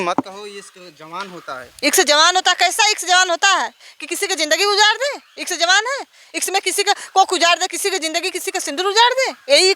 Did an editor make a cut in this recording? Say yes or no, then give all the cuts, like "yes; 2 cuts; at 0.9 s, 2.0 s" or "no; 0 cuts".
no; 0 cuts